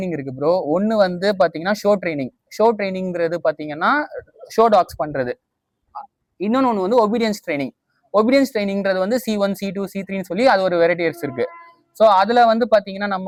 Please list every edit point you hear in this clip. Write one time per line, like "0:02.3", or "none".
none